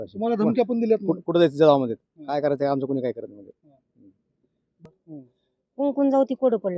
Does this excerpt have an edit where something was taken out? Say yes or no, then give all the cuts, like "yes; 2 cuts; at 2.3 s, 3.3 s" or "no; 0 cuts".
yes; 1 cut; at 4.7 s